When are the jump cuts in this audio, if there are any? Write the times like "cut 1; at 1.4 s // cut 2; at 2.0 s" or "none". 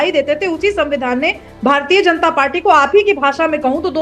none